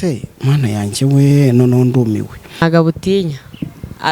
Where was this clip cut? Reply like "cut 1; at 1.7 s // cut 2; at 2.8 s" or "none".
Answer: cut 1; at 2.6 s